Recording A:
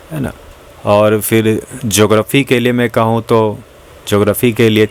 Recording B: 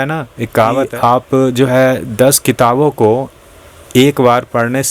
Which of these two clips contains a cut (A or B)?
B